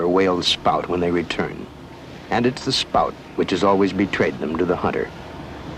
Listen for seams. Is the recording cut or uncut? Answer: cut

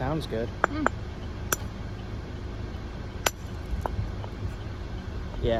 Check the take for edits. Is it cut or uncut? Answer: uncut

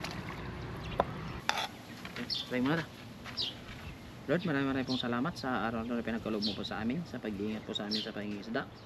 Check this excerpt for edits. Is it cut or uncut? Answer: cut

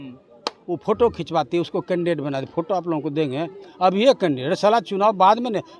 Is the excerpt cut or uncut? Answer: uncut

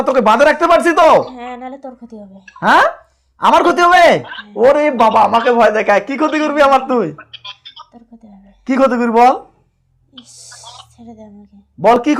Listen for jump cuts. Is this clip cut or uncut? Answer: uncut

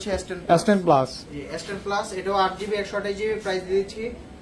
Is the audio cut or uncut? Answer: uncut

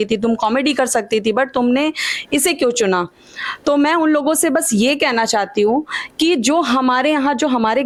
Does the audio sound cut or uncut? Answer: uncut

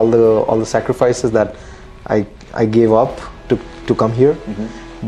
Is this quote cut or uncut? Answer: uncut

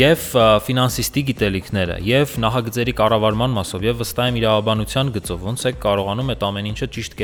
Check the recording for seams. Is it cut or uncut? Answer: uncut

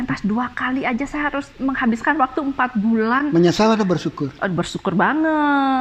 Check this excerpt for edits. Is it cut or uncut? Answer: uncut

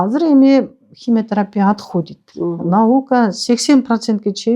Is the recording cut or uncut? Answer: cut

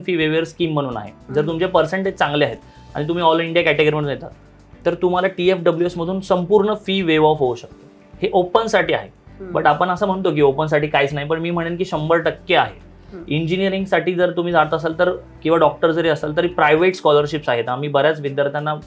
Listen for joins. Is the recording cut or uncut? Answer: uncut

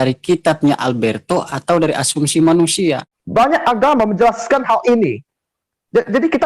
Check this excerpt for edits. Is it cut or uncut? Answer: cut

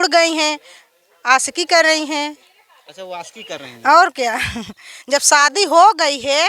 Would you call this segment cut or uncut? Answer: uncut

